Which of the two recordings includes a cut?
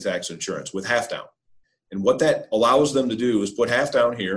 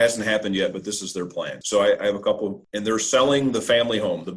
second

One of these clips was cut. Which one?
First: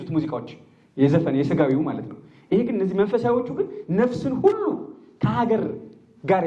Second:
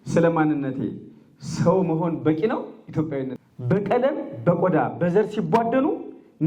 second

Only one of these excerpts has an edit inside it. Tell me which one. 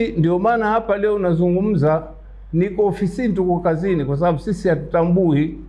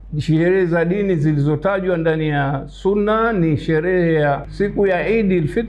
second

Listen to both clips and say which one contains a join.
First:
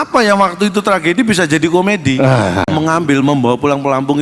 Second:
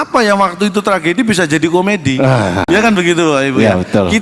first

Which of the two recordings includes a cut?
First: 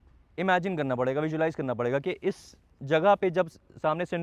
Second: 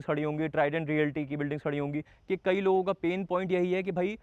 second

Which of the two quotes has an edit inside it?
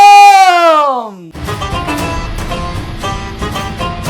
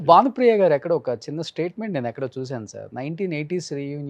first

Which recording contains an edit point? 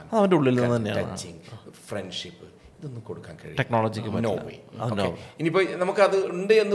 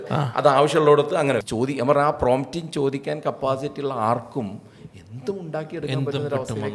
second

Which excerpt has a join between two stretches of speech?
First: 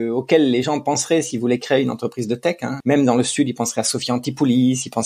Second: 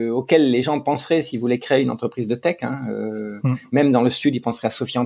first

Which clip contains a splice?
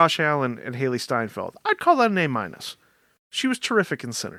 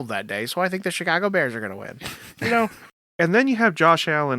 second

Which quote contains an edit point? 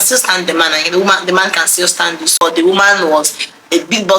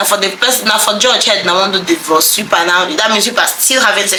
first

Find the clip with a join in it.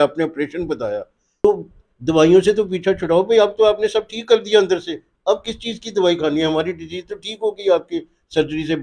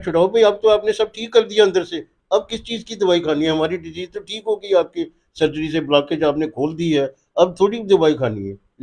first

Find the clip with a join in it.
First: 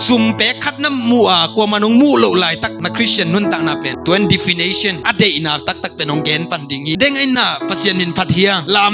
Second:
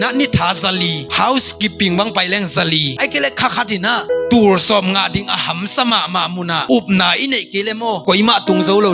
first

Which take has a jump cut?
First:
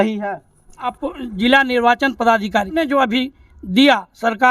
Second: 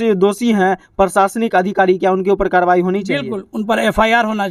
first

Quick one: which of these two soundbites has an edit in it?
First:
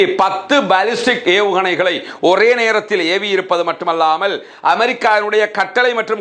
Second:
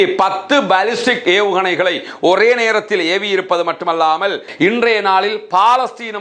second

